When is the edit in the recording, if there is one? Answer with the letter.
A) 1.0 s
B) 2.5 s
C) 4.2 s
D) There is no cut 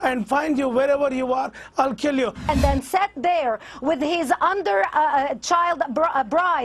B